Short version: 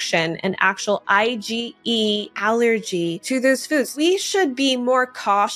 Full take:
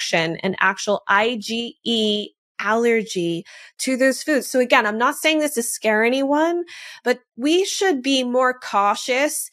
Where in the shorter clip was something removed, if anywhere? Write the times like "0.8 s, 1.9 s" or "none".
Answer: 2.3 s, 3.7 s